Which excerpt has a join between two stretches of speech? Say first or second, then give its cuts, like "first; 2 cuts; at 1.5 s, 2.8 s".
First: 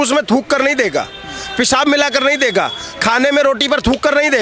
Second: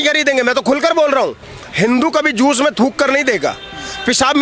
second; 1 cut; at 1.5 s